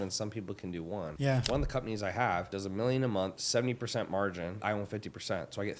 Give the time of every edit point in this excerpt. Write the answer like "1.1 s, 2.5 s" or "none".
1.4 s, 2.6 s, 3.4 s, 4.6 s

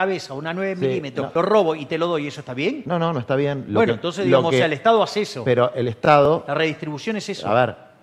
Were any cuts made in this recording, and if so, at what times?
1.3 s, 2.8 s

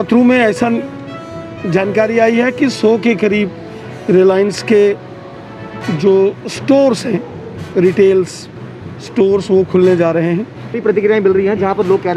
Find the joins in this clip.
10.7 s

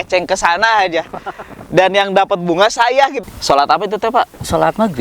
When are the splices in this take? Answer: 3.2 s

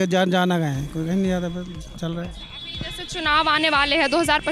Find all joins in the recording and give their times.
none

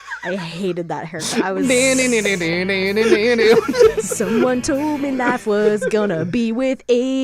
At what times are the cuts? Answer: 3.9 s

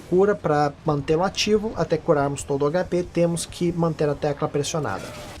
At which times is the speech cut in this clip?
1.7 s

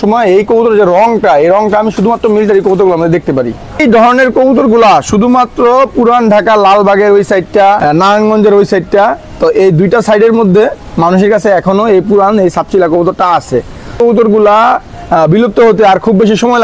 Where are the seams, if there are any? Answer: 3.8 s, 7.8 s, 14.0 s

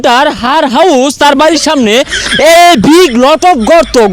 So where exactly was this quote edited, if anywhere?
none

